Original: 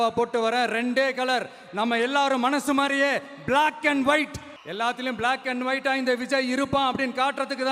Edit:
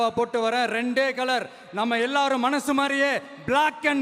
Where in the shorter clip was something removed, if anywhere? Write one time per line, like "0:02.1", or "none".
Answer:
none

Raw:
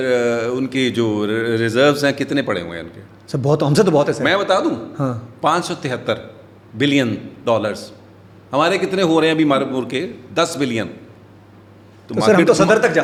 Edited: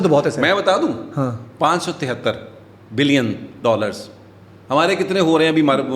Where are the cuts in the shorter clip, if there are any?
none

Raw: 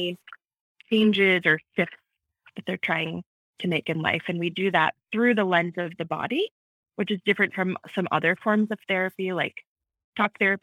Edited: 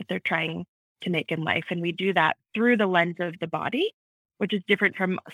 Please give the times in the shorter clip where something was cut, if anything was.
none

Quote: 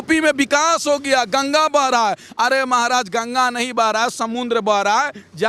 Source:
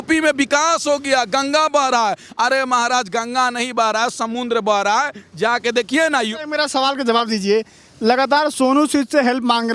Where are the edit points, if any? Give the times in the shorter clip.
none

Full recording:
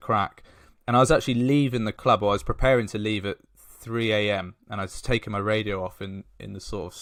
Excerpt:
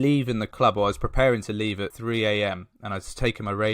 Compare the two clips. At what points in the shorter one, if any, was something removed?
0:01.9

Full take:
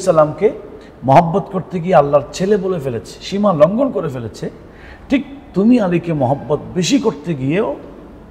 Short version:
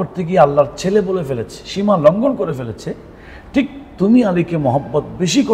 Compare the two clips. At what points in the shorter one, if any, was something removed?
none

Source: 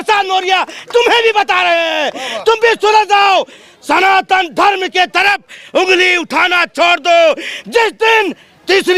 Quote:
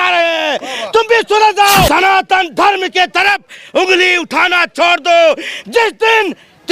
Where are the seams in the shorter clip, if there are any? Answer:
0:01.9

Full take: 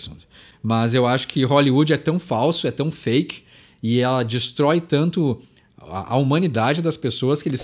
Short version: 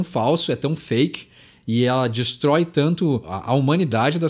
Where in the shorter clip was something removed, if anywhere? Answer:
0:03.3

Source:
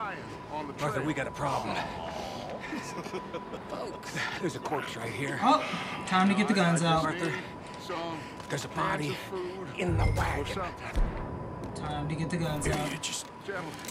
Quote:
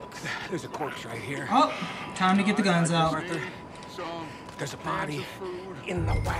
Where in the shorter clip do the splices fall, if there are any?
none

